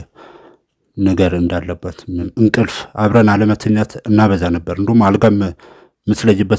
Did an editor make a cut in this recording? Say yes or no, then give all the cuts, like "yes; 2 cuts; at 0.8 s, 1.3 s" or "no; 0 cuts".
yes; 1 cut; at 2.3 s